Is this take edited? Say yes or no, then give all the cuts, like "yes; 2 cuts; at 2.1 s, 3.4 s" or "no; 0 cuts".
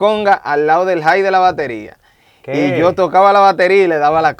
no; 0 cuts